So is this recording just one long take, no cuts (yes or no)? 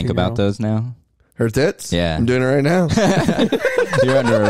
yes